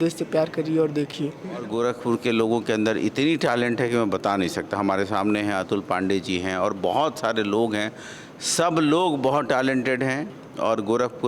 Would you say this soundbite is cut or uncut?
cut